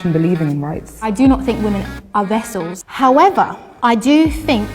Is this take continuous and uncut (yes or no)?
no